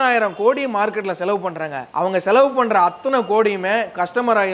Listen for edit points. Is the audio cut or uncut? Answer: uncut